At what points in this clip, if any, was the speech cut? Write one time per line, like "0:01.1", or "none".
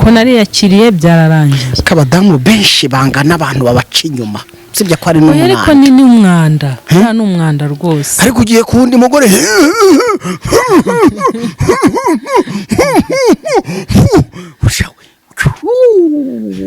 none